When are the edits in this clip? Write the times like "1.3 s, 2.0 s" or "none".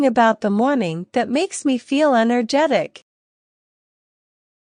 none